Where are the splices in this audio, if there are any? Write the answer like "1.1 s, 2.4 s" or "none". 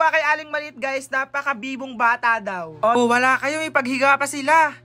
3.0 s